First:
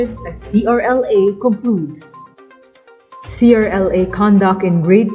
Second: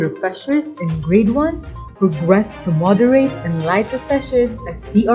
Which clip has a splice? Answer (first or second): first